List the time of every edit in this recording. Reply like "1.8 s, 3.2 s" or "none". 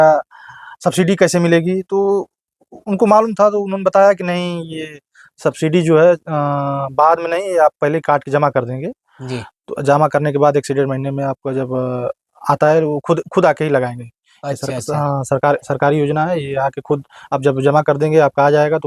none

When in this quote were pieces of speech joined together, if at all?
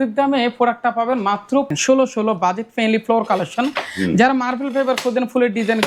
1.7 s

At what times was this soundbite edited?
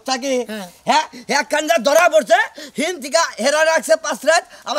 none

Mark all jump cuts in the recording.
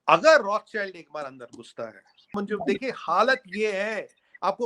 2.3 s

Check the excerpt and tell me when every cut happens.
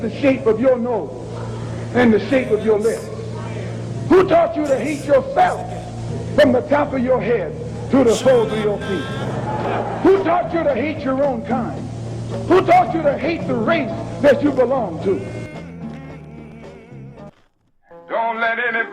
17.3 s

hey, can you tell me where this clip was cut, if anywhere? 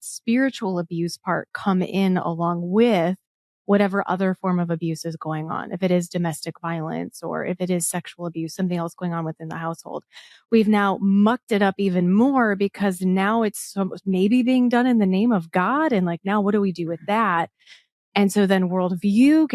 none

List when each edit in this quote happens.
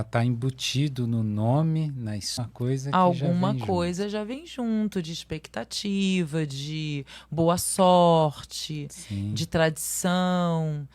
2.4 s

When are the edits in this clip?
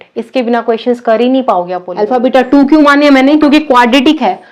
1.9 s

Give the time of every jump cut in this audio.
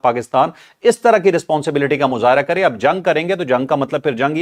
none

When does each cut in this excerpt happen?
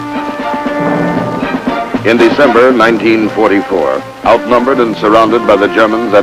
none

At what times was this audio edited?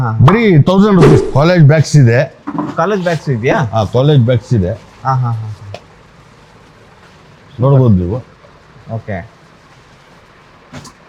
1.3 s

